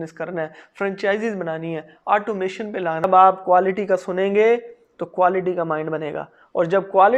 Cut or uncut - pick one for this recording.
cut